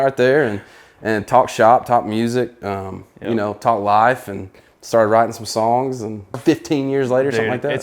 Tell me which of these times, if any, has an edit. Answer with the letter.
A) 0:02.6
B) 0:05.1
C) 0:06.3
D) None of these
C